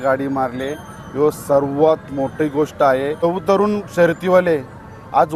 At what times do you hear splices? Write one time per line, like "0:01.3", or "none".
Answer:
0:03.2